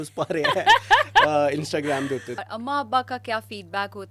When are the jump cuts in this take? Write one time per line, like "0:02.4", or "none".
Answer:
0:02.3